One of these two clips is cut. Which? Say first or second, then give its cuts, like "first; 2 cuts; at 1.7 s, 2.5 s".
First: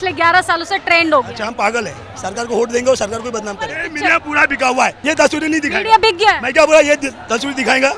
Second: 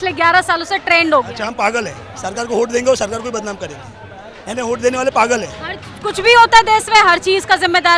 first; 2 cuts; at 3.9 s, 5.0 s